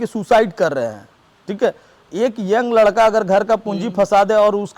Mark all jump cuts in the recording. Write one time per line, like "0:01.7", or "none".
none